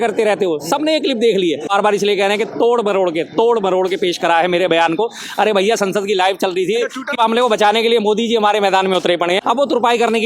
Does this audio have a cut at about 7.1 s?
yes; 3 cuts; at 1.7 s, 7.1 s, 9.4 s

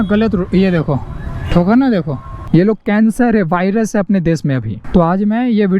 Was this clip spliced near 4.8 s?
yes; 2 cuts; at 2.3 s, 4.8 s

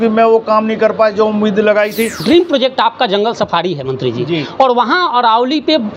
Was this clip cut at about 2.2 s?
yes; 1 cut; at 2.2 s

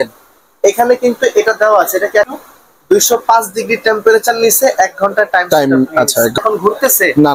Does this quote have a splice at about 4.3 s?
no; 2 cuts; at 2.3 s, 6.4 s

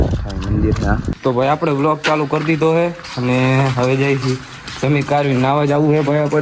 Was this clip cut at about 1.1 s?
yes; 1 cut; at 1.1 s

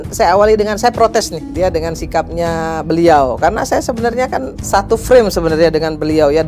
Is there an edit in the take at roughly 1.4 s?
yes; 2 cuts; at 1.4 s, 4.5 s

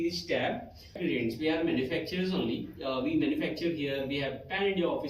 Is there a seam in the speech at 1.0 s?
yes; 1 cut; at 1.0 s

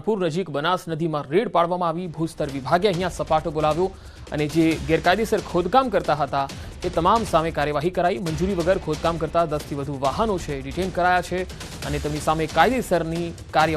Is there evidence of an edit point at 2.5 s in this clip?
yes; 1 cut; at 2.5 s

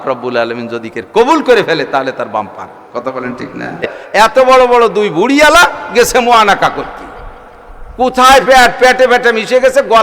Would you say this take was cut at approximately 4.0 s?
yes; 1 cut; at 4.0 s

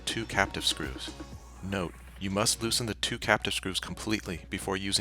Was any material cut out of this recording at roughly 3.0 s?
no; 1 cut; at 1.7 s

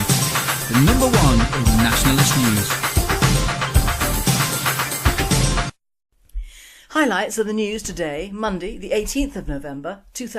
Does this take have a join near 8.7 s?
yes; 1 cut; at 8.7 s

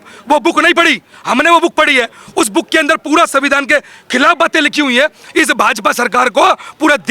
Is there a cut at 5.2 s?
yes; 1 cut; at 5.2 s

